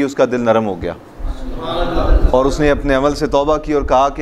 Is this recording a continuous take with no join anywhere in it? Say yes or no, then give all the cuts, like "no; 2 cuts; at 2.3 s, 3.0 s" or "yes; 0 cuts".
yes; 0 cuts